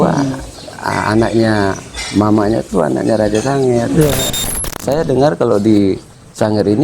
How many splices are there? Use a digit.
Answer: 1